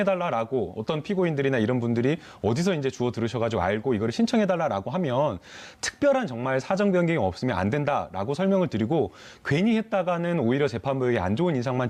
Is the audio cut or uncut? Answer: uncut